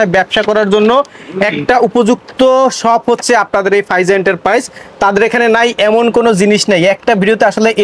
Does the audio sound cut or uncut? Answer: uncut